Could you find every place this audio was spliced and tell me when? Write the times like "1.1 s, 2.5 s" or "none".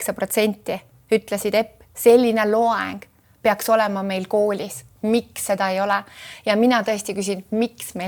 none

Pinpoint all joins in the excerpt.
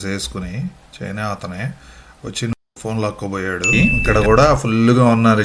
3.7 s

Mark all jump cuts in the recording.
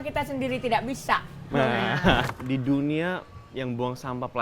2.3 s

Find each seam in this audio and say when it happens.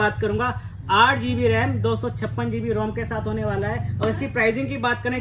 none

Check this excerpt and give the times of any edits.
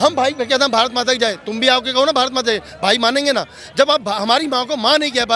none

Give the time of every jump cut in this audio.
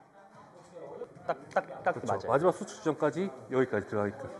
1.0 s

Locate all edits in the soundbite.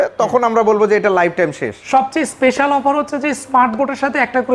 1.8 s

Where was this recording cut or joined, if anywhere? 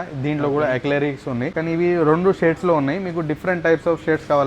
1.5 s

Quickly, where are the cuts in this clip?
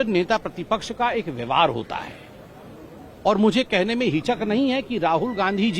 none

